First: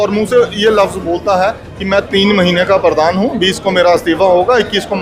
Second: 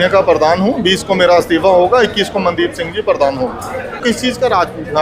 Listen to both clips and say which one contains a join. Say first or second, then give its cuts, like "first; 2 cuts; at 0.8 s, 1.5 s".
second; 1 cut; at 4.0 s